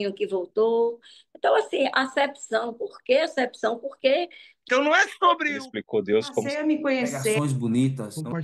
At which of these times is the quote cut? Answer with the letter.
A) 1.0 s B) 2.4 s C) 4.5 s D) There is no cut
C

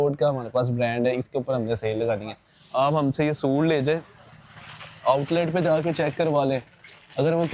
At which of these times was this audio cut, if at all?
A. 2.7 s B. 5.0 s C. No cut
C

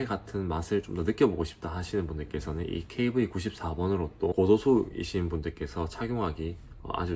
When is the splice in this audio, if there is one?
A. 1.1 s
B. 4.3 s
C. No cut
B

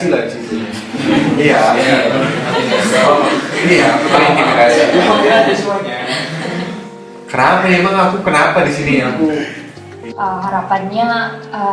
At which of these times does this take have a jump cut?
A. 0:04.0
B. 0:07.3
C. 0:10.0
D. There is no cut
C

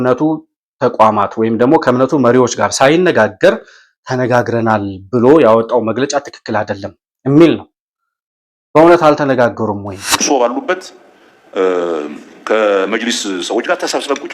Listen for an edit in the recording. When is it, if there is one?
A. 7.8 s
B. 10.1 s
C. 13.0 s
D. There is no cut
B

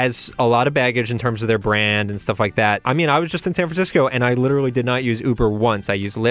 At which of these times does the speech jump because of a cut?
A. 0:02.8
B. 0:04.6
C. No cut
A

